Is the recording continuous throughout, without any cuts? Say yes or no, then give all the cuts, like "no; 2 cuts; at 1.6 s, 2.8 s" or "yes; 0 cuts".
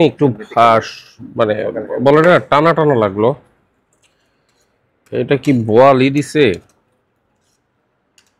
yes; 0 cuts